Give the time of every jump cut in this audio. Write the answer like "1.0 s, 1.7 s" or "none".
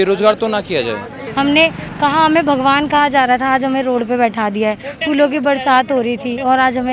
1.2 s